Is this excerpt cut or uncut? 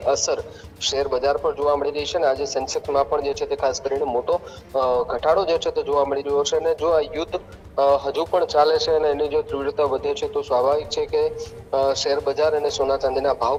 uncut